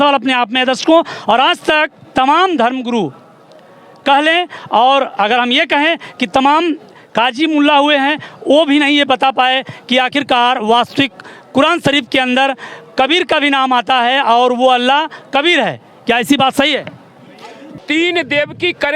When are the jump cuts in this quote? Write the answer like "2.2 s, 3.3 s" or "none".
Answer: 17.8 s